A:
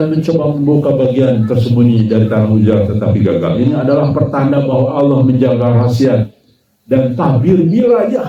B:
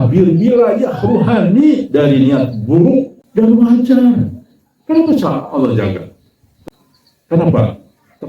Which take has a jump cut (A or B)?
B